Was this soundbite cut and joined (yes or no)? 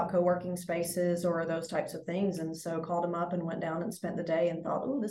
no